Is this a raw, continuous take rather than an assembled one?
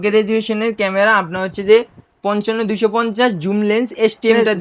yes; 0 cuts

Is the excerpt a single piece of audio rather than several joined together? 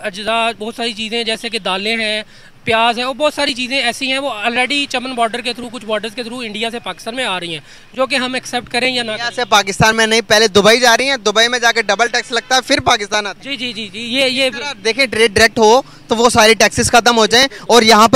yes; 0 cuts

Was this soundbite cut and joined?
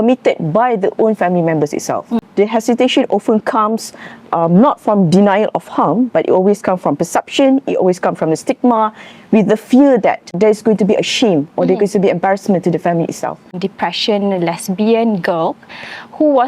yes; 3 cuts; at 2.2 s, 10.3 s, 13.6 s

